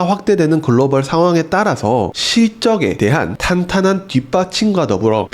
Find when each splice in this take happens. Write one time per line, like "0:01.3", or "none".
0:02.1